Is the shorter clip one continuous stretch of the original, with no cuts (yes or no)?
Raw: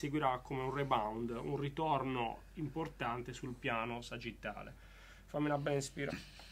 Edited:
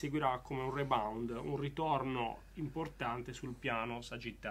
yes